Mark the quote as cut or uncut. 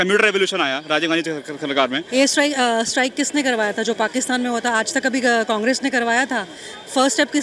cut